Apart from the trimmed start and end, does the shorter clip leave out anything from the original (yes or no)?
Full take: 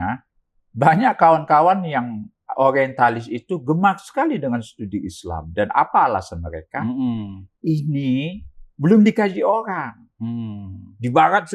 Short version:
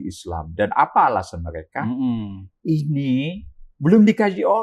no